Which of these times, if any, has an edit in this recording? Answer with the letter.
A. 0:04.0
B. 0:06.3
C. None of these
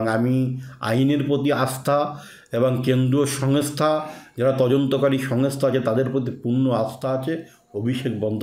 C